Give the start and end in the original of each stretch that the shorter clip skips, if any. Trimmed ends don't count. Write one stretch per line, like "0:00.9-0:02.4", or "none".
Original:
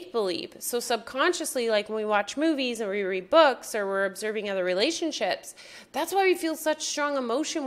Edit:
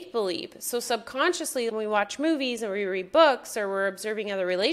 0:01.7-0:01.9